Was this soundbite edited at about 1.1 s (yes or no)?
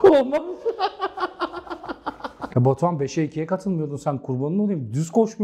no